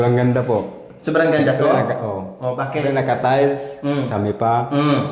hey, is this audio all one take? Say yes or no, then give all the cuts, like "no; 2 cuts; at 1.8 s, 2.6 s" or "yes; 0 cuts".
no; 1 cut; at 4.1 s